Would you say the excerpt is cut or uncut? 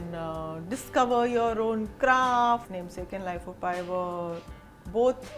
cut